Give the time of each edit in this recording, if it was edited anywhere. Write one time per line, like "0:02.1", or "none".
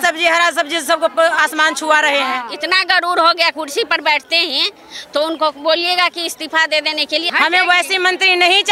0:02.5
0:07.3